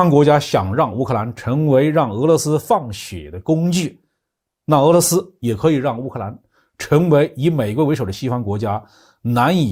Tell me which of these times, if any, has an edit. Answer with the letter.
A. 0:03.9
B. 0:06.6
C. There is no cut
C